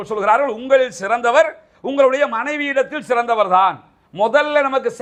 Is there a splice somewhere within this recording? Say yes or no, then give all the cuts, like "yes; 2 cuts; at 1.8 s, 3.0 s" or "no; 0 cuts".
no; 0 cuts